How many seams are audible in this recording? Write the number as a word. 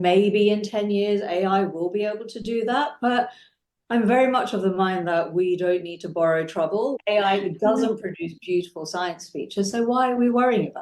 one